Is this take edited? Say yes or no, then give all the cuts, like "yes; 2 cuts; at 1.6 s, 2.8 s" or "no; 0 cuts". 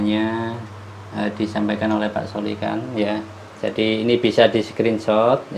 no; 0 cuts